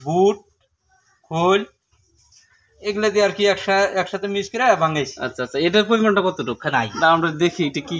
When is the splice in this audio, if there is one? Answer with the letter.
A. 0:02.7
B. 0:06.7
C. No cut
B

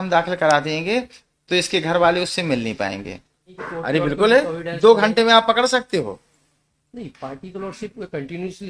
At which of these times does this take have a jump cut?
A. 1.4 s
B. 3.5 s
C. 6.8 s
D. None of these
B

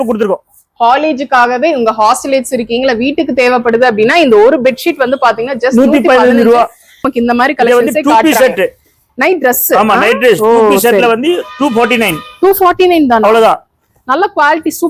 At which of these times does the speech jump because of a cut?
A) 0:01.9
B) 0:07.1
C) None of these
B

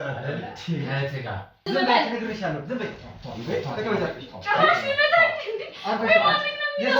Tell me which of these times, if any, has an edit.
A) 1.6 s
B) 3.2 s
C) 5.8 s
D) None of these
A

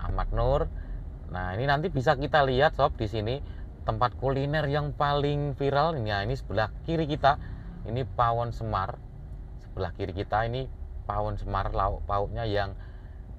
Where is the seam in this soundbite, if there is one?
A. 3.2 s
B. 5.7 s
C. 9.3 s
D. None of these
D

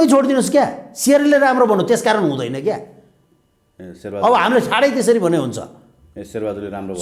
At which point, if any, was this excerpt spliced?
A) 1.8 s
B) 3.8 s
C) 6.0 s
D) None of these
D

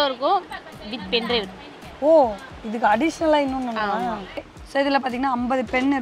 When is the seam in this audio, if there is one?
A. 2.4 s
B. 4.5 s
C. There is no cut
B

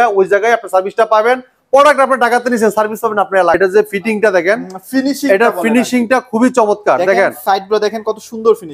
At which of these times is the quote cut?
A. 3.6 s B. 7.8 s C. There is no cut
A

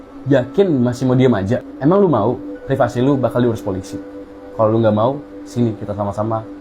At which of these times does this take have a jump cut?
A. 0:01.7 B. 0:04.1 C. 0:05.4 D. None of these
A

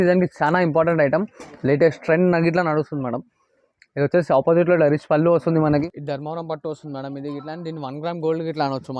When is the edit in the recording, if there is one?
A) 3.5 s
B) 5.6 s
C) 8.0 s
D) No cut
B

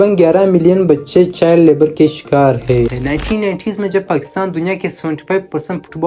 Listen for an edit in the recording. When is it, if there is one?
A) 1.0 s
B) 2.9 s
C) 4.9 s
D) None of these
B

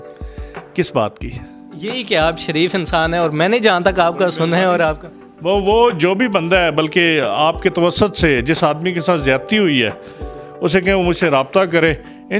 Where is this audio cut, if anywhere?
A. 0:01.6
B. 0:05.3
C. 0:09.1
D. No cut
D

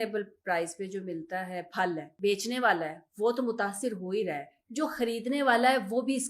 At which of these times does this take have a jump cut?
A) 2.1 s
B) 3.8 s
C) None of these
A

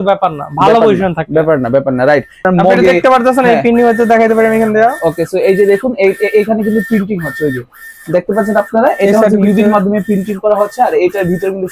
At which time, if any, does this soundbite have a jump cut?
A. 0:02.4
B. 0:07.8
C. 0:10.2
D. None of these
A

